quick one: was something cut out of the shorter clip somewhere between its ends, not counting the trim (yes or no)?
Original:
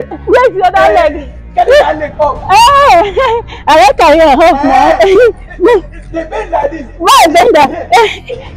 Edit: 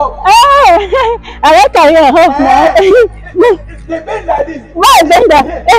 no